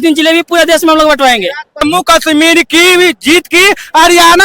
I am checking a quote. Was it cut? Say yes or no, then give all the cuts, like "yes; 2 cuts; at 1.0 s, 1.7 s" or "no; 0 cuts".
yes; 1 cut; at 2.0 s